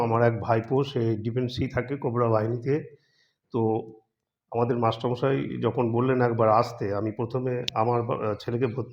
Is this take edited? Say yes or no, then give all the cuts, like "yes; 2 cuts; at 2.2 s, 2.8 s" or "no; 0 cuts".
no; 0 cuts